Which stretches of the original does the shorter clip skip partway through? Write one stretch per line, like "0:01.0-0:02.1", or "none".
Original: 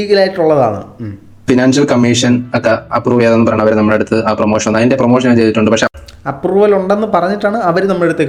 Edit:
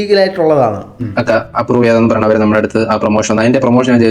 0:01.1-0:02.5